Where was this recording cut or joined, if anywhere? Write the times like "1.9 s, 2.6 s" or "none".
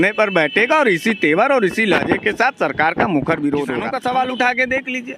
3.8 s